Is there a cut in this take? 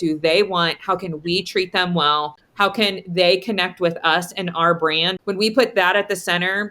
yes; 2 cuts; at 2.4 s, 5.1 s

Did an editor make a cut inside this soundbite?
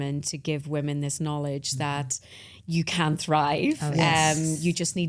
no; 0 cuts

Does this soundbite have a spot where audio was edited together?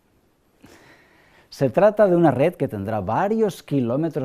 no; 0 cuts

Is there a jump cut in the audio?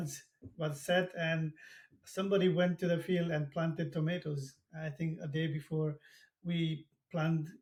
no; 0 cuts

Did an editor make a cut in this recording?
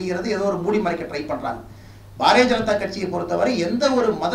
no; 0 cuts

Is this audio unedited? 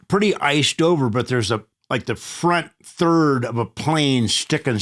no; 1 cut; at 1.7 s

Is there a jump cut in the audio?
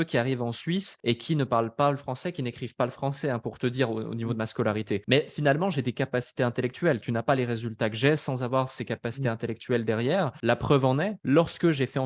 yes; 4 cuts; at 0.9 s, 5.0 s, 10.4 s, 11.2 s

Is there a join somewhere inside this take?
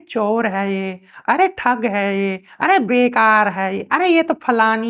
no; 0 cuts

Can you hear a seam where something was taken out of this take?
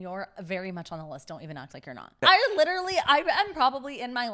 yes; 1 cut; at 2.2 s

